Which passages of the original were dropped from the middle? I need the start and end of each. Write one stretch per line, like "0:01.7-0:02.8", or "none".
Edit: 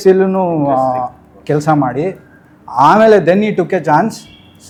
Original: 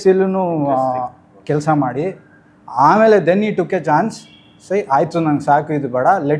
none